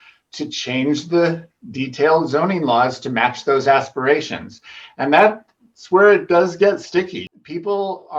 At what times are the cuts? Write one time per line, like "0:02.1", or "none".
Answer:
0:07.2

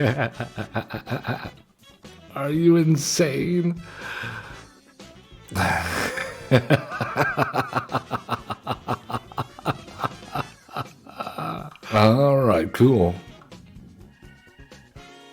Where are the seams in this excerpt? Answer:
0:05.3
0:11.9
0:14.1

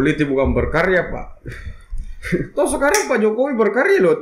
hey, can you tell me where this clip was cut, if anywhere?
none

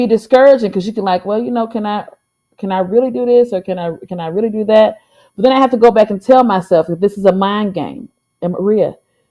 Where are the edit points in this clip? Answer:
none

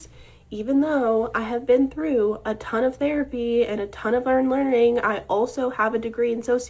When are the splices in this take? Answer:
0:04.6

